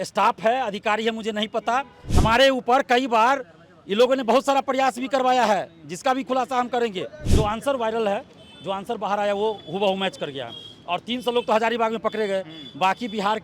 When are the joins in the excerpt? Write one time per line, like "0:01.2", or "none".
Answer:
0:02.0
0:07.2